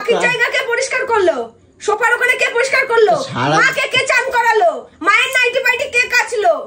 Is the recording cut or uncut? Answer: uncut